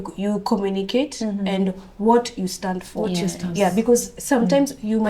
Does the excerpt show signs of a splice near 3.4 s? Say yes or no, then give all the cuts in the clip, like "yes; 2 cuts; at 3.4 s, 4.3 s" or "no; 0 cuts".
no; 0 cuts